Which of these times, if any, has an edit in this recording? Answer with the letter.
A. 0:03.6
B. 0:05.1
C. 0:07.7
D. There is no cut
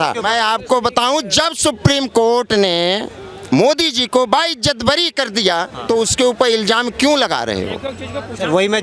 D